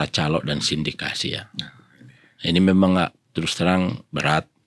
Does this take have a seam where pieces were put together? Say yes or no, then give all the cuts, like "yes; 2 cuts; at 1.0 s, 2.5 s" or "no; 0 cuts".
no; 0 cuts